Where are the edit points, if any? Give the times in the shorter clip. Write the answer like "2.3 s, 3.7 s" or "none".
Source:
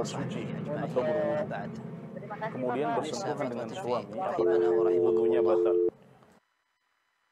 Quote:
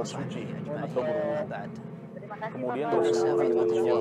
2.9 s